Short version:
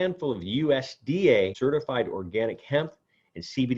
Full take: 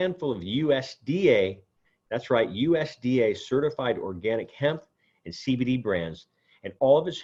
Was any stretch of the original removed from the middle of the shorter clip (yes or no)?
yes